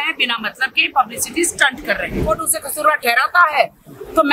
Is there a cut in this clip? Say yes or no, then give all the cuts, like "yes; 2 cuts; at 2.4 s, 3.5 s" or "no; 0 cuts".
yes; 1 cut; at 2.2 s